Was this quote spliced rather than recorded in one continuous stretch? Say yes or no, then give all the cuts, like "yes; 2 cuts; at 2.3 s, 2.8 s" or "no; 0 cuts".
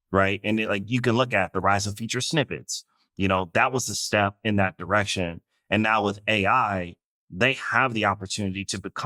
no; 0 cuts